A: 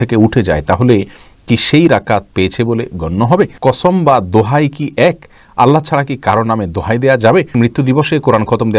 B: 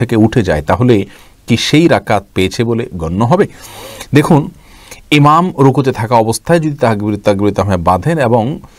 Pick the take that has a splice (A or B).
A